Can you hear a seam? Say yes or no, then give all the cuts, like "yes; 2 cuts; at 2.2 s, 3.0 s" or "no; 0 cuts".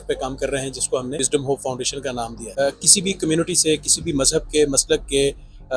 yes; 2 cuts; at 1.2 s, 2.4 s